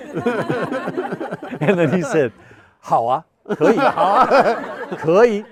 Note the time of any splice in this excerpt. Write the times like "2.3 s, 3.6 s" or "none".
none